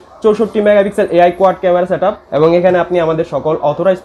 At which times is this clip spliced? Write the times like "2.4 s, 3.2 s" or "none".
2.2 s